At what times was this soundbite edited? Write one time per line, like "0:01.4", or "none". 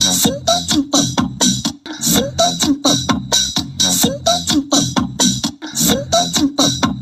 0:01.6
0:05.6